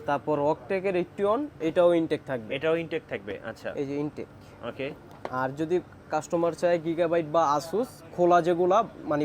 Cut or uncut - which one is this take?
uncut